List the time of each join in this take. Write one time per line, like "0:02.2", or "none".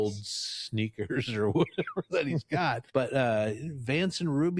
0:02.8